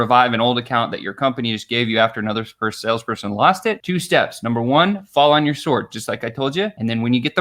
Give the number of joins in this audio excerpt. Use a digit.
0